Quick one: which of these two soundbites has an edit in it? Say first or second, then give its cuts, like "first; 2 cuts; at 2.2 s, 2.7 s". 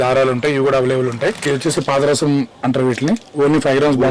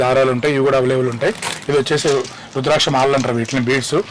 first; 1 cut; at 1.4 s